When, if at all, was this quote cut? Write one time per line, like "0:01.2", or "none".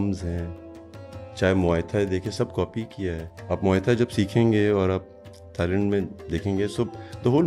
0:03.3